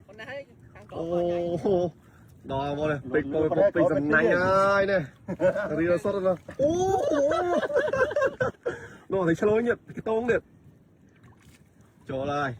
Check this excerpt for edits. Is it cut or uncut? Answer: uncut